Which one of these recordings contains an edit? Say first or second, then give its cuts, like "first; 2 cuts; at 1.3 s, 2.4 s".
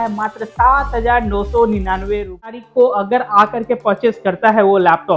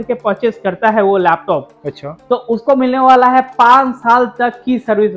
first; 1 cut; at 2.6 s